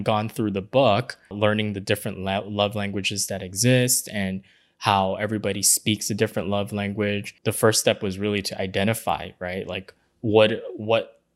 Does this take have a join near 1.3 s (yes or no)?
yes